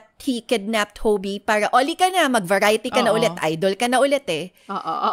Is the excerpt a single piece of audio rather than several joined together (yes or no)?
yes